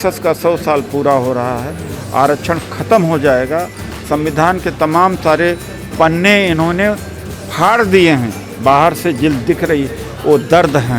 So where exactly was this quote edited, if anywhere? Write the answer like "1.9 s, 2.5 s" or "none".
none